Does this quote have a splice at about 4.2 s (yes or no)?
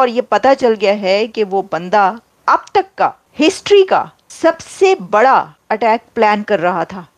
yes